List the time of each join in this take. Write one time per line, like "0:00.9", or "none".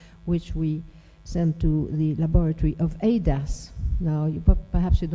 none